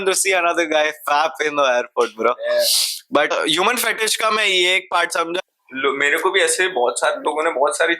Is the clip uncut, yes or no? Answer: no